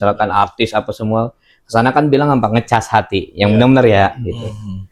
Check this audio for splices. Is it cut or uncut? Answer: uncut